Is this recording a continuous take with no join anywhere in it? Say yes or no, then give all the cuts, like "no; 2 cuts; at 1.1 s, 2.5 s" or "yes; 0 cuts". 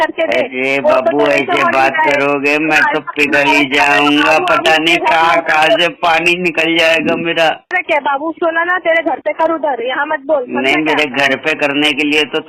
no; 1 cut; at 7.8 s